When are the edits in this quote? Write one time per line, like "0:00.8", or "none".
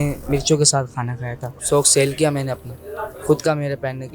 0:01.5